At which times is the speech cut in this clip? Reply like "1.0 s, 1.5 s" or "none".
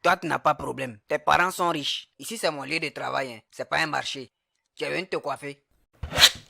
5.6 s

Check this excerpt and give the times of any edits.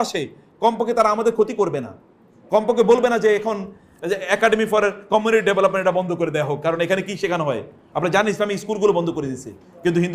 none

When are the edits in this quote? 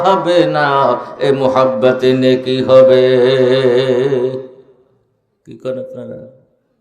none

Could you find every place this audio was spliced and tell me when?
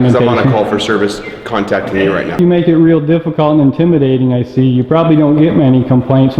2.4 s

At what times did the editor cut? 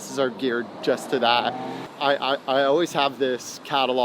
1.8 s

